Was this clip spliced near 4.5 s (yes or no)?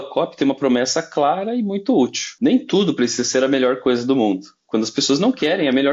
no